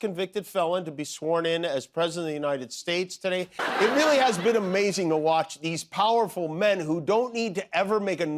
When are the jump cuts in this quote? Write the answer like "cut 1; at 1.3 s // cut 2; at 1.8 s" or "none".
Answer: cut 1; at 3.2 s